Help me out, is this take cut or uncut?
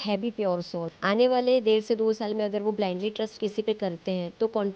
cut